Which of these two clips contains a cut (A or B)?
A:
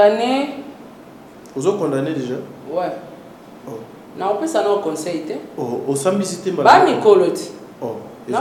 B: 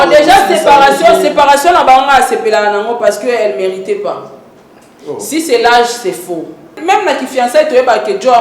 B